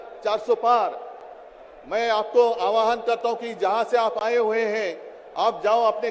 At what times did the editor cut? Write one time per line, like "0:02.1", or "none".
none